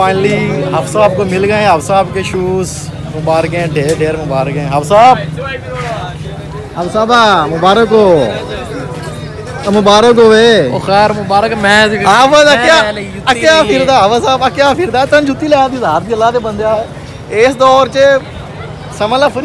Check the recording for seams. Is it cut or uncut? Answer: uncut